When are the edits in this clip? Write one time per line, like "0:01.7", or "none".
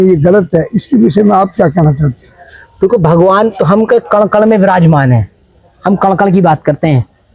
none